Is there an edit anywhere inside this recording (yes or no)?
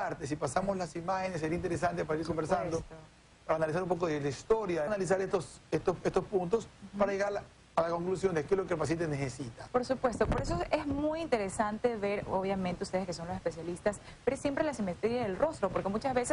no